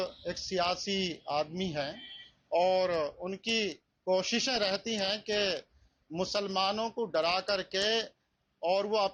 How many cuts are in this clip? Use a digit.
0